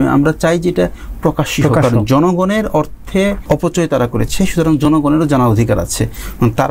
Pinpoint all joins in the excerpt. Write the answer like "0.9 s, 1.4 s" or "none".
3.4 s